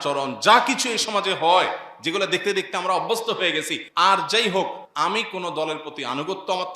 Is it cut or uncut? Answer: cut